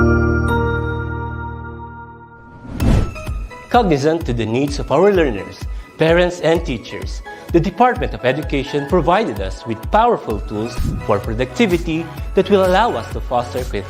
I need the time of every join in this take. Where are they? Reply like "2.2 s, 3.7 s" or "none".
2.3 s